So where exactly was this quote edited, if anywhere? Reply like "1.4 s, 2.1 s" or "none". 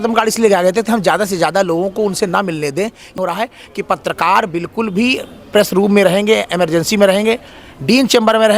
3.1 s